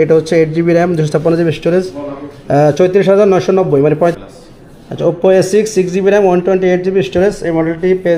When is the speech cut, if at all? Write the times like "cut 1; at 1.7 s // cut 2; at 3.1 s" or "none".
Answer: cut 1; at 4.1 s

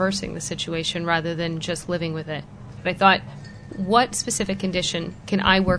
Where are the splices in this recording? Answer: cut 1; at 2.8 s // cut 2; at 3.7 s

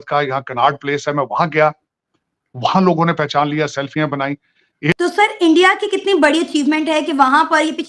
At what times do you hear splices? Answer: cut 1; at 4.9 s

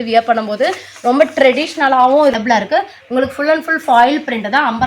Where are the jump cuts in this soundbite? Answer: cut 1; at 2.4 s

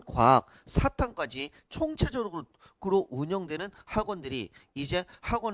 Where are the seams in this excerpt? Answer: none

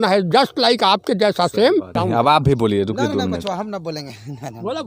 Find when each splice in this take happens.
cut 1; at 1.9 s

